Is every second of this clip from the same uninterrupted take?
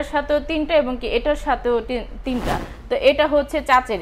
no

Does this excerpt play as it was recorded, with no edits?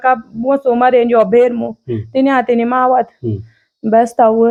yes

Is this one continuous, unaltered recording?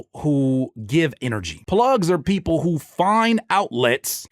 no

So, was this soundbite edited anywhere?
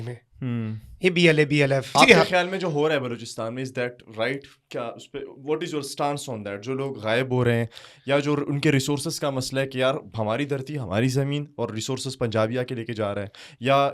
yes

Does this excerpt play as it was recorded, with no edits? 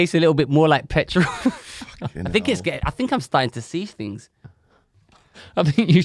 no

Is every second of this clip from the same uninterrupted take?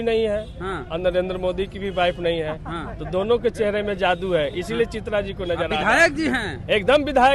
yes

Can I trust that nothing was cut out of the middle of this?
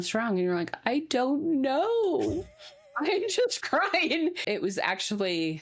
no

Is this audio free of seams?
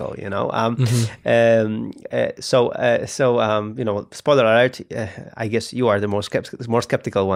yes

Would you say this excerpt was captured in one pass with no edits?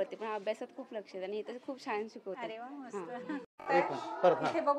yes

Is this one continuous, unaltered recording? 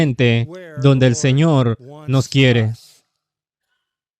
yes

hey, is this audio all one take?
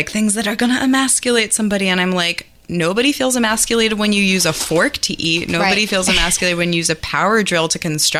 yes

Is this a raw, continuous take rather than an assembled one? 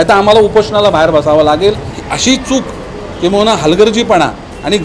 no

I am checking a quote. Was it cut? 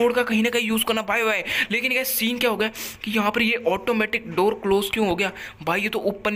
no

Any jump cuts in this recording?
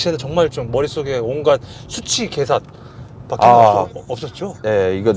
no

